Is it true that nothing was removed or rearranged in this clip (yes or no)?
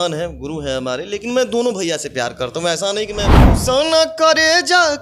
no